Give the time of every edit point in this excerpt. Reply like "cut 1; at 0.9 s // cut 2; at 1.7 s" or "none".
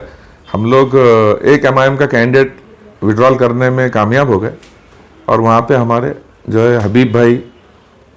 none

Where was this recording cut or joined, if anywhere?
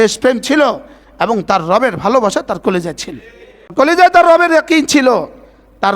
cut 1; at 3.7 s

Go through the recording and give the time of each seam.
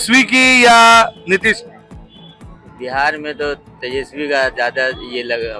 none

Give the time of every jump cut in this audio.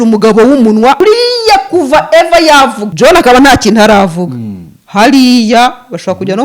cut 1; at 1.0 s // cut 2; at 2.8 s

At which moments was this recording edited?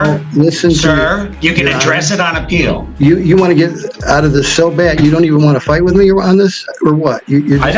cut 1; at 2.9 s

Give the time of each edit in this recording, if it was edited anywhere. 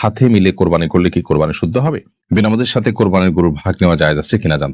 cut 1; at 2.1 s

